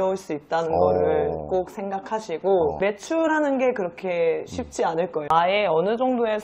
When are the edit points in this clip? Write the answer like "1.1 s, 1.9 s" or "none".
5.2 s